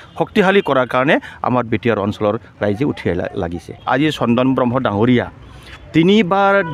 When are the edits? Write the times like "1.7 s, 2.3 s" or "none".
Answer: 3.8 s